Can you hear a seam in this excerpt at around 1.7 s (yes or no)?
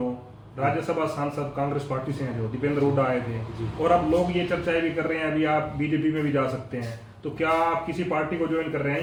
no